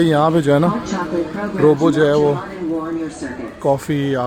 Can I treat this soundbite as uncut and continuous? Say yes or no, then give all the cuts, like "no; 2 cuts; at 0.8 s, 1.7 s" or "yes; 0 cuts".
yes; 0 cuts